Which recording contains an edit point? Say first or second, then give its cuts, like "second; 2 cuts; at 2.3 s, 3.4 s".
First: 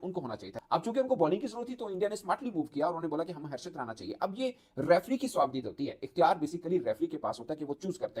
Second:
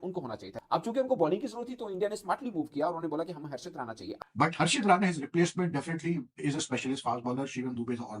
second; 1 cut; at 4.1 s